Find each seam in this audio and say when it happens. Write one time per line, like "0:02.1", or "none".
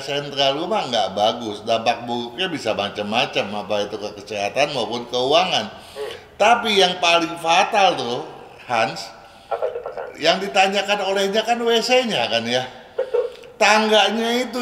none